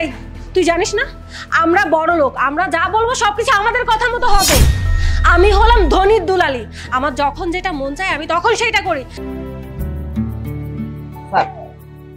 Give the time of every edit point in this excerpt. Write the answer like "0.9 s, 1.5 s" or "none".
9.1 s

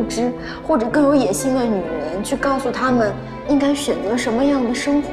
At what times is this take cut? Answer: 3.3 s

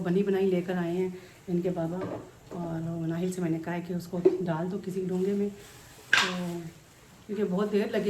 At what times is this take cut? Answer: none

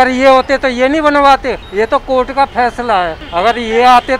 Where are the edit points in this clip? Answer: 1.6 s, 3.2 s

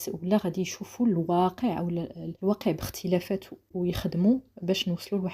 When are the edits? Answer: 2.2 s, 3.7 s

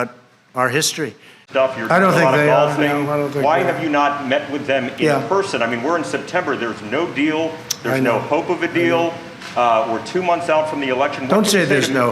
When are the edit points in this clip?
1.4 s

